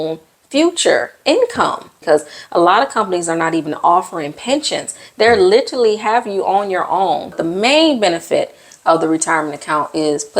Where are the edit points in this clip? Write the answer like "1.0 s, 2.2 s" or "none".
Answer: 1.9 s, 7.4 s